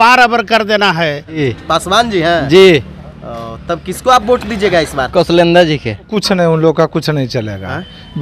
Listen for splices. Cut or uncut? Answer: cut